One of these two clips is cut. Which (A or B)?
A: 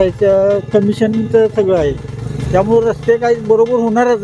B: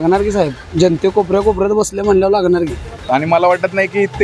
B